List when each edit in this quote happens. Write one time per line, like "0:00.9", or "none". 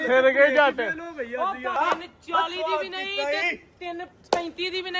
0:01.7